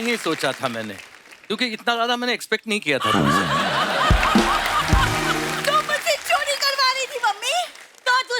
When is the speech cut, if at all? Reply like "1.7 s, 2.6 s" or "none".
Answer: 5.6 s